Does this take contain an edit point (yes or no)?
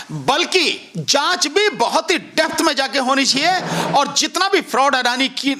no